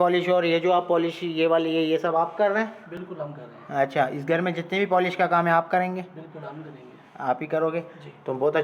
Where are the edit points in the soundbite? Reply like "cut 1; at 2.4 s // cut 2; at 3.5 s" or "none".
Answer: none